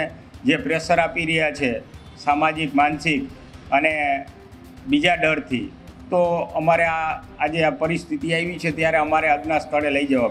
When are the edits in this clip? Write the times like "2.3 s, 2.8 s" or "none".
none